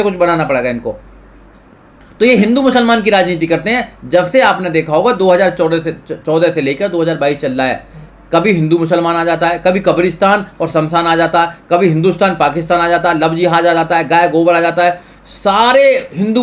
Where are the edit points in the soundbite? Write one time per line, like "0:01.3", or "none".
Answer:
none